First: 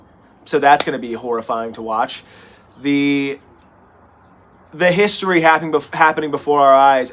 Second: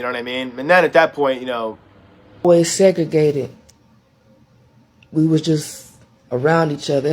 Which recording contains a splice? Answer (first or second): second